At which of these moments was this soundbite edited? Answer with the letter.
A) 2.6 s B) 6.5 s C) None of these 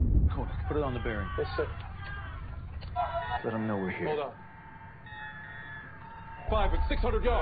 B